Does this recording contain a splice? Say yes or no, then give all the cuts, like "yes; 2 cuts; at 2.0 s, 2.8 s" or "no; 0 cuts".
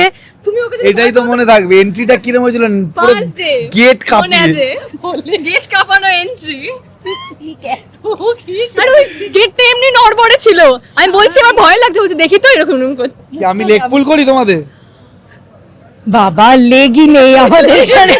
yes; 1 cut; at 13.2 s